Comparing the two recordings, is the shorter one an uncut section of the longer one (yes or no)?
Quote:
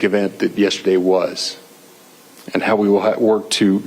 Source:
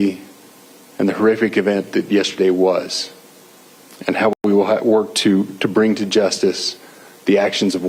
no